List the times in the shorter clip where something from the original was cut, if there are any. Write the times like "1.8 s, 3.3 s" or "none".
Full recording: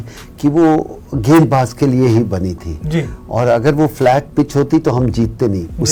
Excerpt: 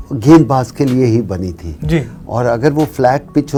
none